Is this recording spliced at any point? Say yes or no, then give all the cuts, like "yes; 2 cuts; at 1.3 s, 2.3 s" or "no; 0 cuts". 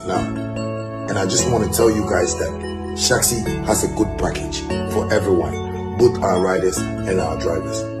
no; 0 cuts